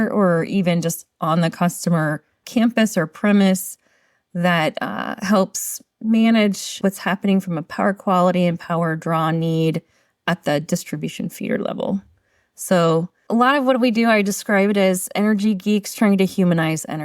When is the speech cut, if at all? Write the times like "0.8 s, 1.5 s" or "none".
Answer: 2.4 s, 6.7 s, 13.2 s